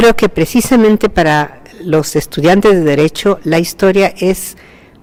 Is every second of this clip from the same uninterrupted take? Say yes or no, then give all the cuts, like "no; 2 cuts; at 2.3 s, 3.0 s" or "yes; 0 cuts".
yes; 0 cuts